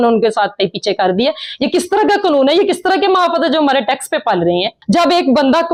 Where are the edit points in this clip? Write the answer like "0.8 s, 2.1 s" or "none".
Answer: none